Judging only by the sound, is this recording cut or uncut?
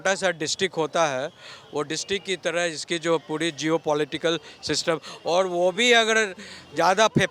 uncut